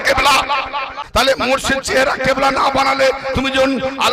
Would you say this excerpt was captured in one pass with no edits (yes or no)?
no